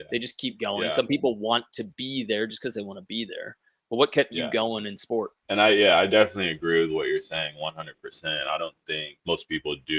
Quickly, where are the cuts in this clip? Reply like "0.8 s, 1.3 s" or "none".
none

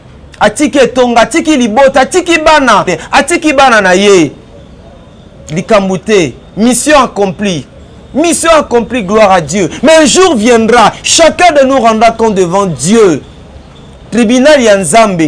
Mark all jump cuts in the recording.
2.9 s

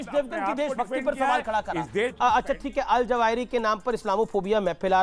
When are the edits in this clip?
2.1 s

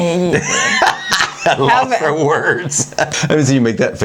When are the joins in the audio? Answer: 3.1 s

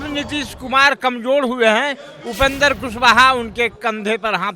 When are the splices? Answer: none

